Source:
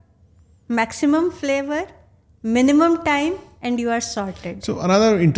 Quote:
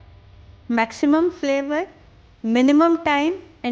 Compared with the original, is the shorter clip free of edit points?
yes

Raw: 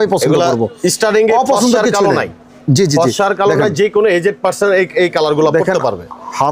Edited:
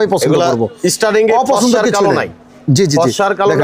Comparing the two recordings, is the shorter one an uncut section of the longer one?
yes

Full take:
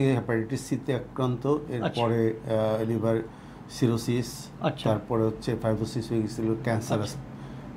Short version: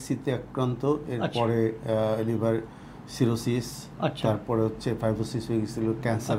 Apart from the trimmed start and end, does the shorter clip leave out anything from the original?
no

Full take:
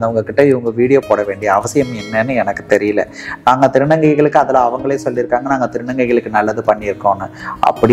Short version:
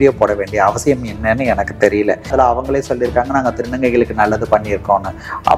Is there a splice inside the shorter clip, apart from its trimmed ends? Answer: yes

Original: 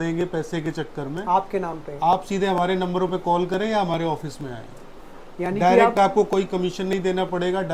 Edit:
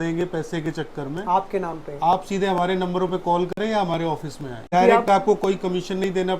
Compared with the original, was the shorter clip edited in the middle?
yes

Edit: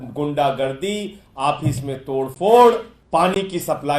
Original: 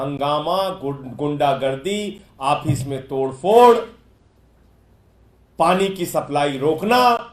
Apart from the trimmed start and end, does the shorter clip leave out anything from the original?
yes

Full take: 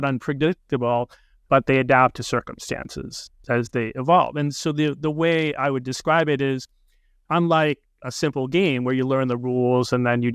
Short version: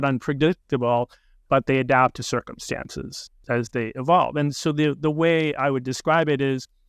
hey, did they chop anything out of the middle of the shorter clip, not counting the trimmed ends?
no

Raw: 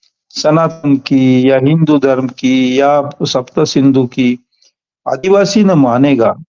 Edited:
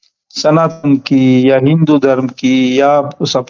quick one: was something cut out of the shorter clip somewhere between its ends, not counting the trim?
no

